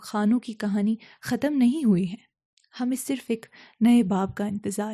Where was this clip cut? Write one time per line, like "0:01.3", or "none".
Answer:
none